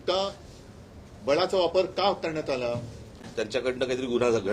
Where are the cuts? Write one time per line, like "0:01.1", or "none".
0:03.3